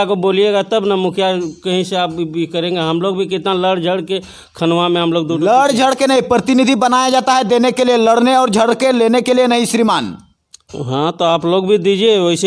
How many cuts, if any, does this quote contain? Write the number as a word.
zero